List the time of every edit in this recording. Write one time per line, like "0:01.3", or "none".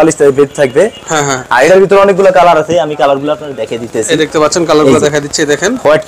none